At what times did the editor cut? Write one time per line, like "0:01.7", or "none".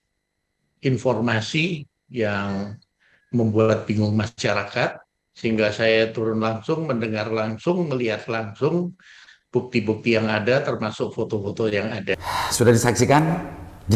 0:12.2